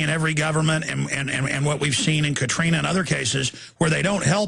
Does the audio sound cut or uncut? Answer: cut